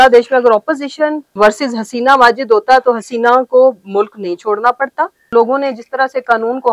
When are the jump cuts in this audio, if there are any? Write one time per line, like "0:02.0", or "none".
0:01.3
0:05.3

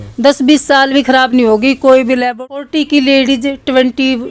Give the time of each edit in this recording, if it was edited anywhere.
0:02.5

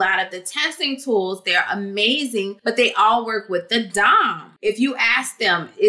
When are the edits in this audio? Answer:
0:02.6
0:04.5

